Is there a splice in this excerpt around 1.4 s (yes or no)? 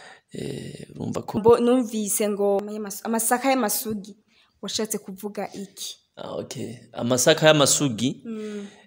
yes